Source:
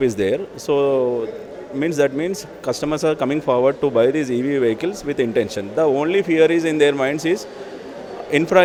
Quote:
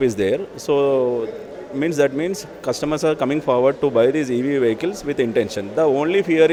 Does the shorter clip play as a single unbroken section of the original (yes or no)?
yes